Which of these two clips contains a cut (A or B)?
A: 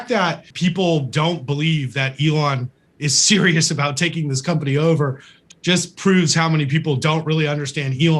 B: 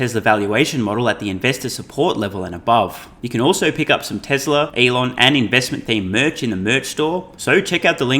B